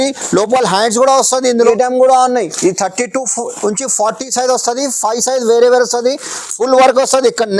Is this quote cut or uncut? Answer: cut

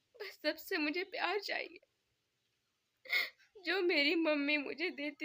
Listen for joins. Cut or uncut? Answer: uncut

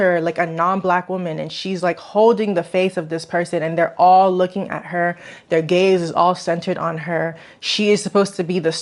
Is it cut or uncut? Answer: uncut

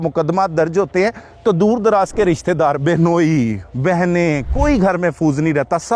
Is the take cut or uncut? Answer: uncut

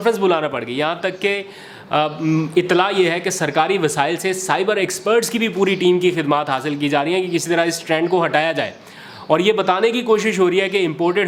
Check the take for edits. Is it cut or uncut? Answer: uncut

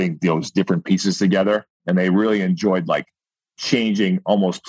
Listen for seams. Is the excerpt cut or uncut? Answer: uncut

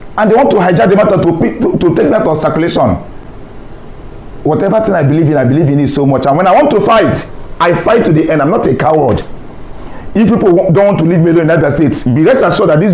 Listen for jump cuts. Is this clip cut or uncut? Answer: uncut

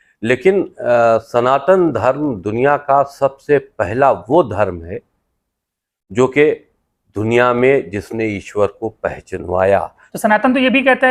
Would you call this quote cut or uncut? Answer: cut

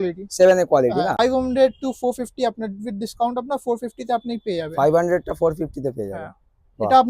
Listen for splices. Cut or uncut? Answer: cut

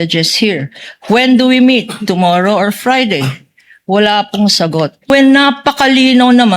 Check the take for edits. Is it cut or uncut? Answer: cut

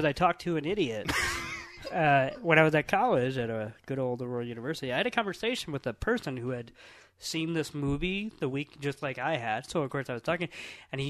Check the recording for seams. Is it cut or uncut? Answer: uncut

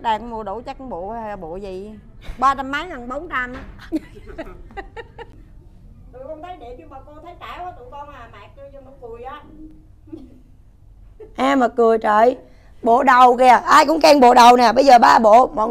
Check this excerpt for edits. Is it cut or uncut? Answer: cut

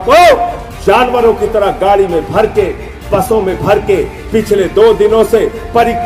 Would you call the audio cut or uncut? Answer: uncut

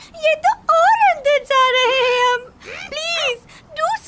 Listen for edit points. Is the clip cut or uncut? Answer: uncut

